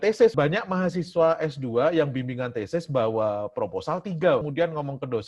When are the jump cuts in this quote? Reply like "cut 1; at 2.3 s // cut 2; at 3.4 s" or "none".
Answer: none

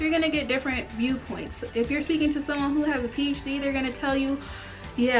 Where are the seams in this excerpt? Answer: none

